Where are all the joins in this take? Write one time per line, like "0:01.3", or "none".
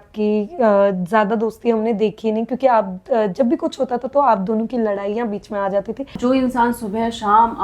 0:06.1